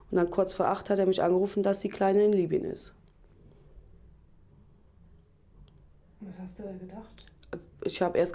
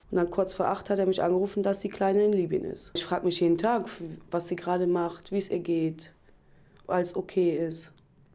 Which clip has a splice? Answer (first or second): second